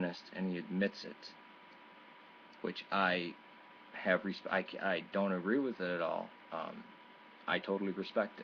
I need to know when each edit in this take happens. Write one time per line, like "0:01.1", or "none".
none